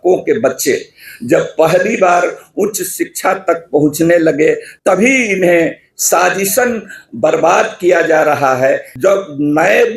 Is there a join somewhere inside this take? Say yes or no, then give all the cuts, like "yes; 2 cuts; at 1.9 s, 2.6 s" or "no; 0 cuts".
yes; 2 cuts; at 4.7 s, 8.9 s